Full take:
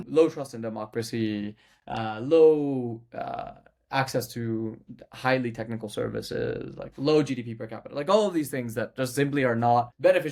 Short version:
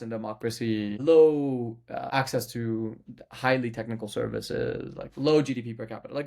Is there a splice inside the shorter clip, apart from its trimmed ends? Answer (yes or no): yes